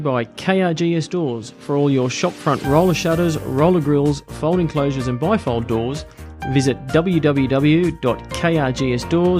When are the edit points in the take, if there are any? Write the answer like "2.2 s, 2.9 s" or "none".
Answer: none